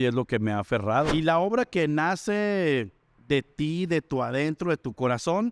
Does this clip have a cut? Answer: yes; 1 cut; at 1.1 s

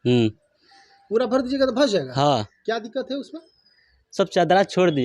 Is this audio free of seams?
yes; 0 cuts

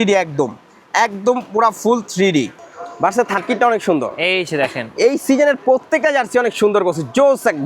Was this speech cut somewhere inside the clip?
yes; 1 cut; at 2.6 s

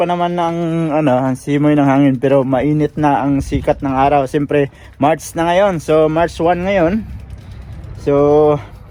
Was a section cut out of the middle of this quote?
no; 0 cuts

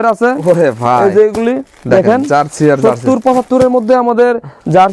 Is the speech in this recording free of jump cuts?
yes; 0 cuts

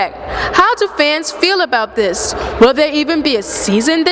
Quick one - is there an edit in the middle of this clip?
no; 0 cuts

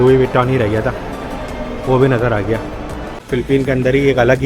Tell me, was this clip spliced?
yes; 1 cut; at 3.2 s

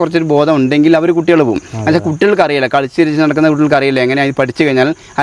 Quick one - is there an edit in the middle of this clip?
no; 0 cuts

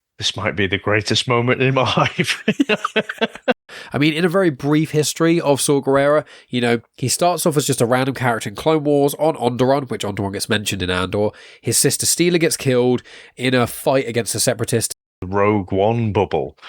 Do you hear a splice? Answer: yes; 2 cuts; at 3.7 s, 15.1 s

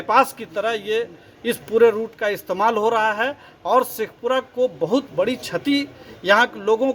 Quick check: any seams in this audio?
no; 0 cuts

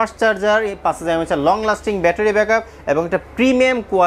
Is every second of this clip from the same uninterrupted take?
yes; 0 cuts

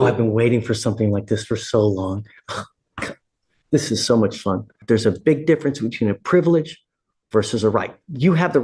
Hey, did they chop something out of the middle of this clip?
yes; 1 cut; at 4.8 s

